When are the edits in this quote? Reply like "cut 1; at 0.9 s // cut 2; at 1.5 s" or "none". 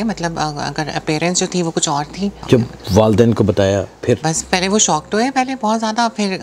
cut 1; at 2.3 s // cut 2; at 4.2 s